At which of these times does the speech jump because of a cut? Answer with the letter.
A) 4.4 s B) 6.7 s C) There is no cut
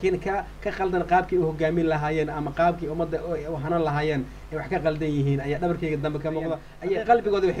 B